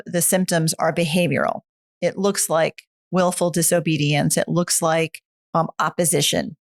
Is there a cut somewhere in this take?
no; 0 cuts

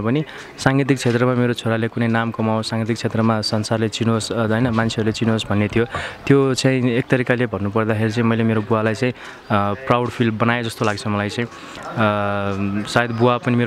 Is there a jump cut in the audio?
no; 0 cuts

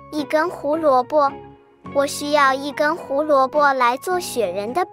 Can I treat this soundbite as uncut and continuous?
yes; 0 cuts

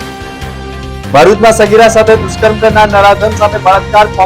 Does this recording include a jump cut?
yes; 1 cut; at 1.1 s

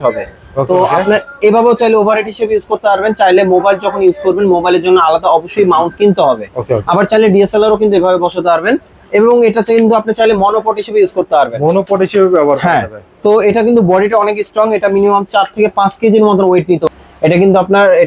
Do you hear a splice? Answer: yes; 1 cut; at 16.9 s

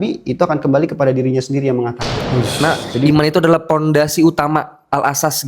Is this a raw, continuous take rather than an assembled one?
no; 1 cut; at 2.6 s

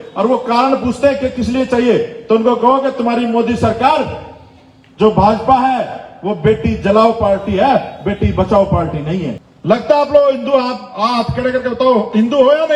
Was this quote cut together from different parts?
yes; 1 cut; at 9.5 s

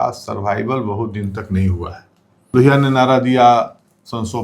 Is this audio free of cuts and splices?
no; 1 cut; at 2.5 s

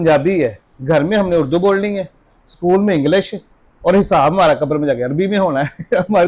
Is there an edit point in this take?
no; 0 cuts

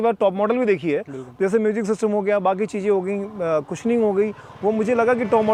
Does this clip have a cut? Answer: no; 0 cuts

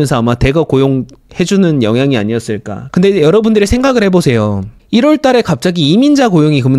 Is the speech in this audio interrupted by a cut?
yes; 1 cut; at 2.7 s

